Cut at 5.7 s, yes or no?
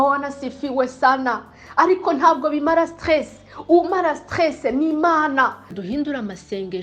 yes